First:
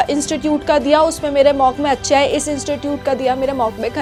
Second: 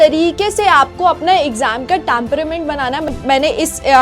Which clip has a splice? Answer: second; 1 cut; at 3.1 s

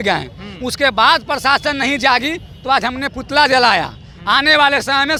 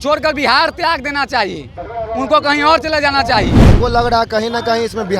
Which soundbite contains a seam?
second; 1 cut; at 3.7 s

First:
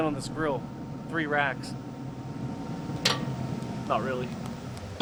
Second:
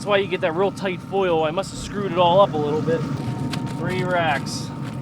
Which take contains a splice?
second; 1 cut; at 3.2 s

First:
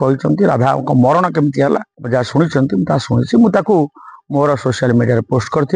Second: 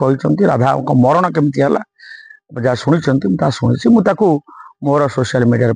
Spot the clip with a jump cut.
first; 1 cut; at 1.9 s

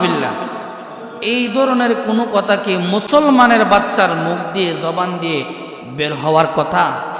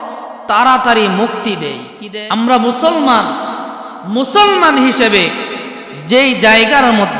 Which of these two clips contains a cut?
second; 1 cut; at 1.9 s

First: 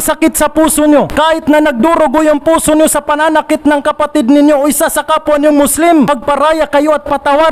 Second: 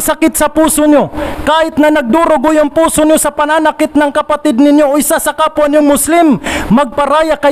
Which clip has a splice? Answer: first; 2 cuts; at 1.1 s, 6.1 s

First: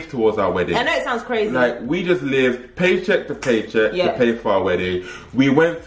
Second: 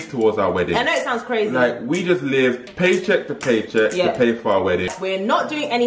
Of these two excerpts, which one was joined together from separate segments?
second; 1 cut; at 4.9 s

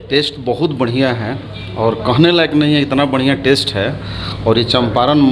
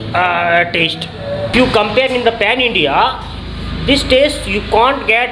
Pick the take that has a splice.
second; 1 cut; at 1.5 s

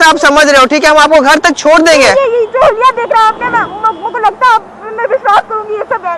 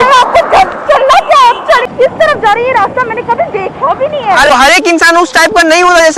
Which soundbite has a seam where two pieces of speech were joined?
second; 2 cuts; at 1.9 s, 4.5 s

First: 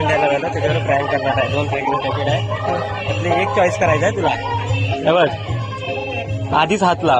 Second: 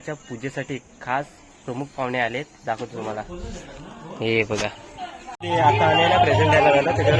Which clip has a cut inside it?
second; 1 cut; at 5.3 s

